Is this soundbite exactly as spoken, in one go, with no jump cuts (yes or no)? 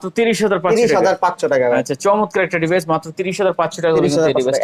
yes